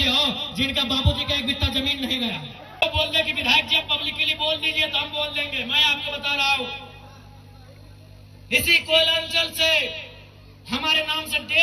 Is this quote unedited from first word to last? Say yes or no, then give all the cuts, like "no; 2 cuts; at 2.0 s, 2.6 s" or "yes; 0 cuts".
no; 1 cut; at 2.8 s